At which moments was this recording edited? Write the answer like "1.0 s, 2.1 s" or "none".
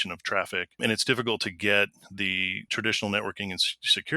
0.8 s, 2.7 s